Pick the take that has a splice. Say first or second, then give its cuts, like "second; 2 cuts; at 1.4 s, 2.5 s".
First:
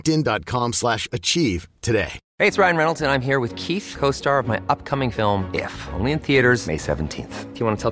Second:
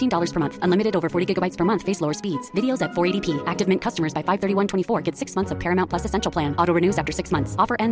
first; 1 cut; at 2.2 s